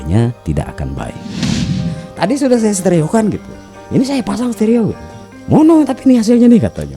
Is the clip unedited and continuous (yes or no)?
no